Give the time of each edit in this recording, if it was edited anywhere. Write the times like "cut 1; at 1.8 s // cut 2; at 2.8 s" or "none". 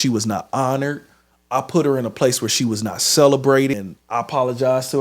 cut 1; at 3.7 s

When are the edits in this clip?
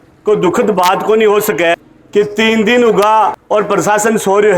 cut 1; at 1.7 s // cut 2; at 3.4 s

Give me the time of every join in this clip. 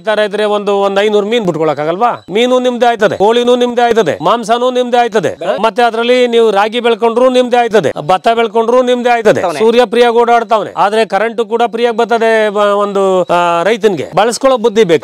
cut 1; at 5.4 s // cut 2; at 9.4 s // cut 3; at 14.1 s

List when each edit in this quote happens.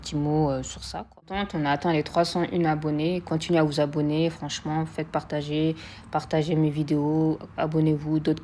cut 1; at 1.3 s

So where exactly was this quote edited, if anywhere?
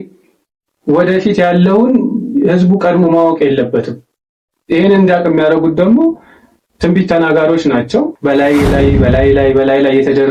cut 1; at 8.1 s

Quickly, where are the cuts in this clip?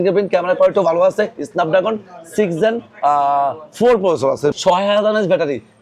cut 1; at 4.5 s

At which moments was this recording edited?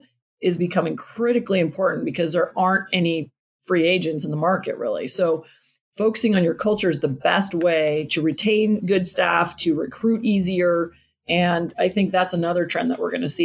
none

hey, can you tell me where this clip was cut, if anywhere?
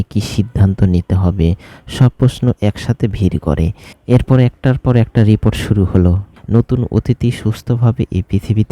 cut 1; at 3.9 s // cut 2; at 6.3 s

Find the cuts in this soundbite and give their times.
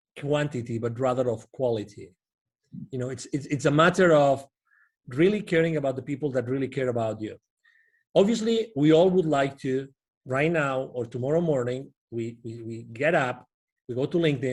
none

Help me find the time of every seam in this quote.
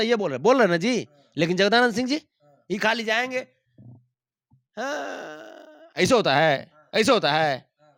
none

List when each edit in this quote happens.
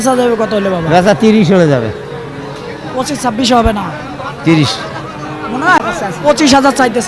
cut 1; at 5.8 s

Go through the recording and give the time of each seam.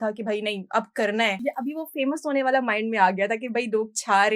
cut 1; at 1.4 s

